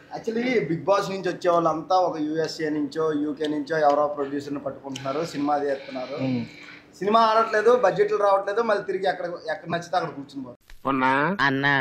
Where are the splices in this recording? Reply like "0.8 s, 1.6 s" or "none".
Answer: 10.5 s